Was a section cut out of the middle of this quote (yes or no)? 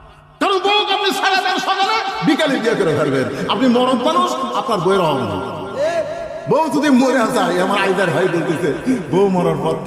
no